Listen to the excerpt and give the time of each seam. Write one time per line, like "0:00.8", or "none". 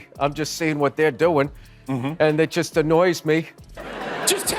0:03.7

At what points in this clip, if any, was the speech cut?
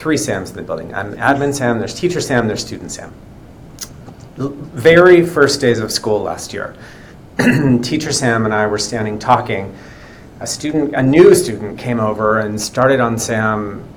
none

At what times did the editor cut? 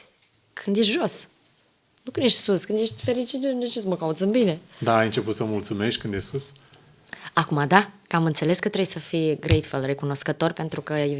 none

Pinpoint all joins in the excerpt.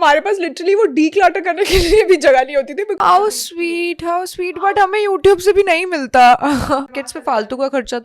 0:03.0
0:06.9

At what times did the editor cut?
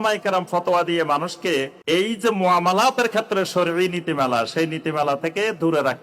0:01.8

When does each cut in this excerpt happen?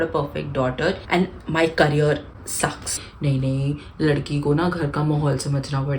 0:01.0
0:02.9

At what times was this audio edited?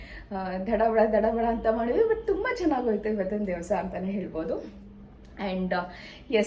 none

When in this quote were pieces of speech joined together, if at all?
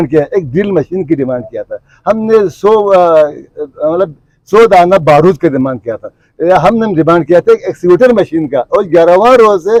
none

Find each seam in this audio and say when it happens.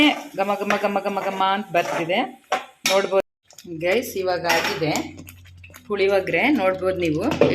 0:03.3

